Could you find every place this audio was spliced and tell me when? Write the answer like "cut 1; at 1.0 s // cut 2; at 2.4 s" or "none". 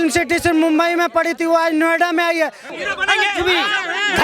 cut 1; at 2.7 s